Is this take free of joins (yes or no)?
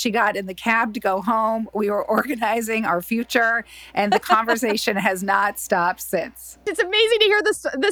no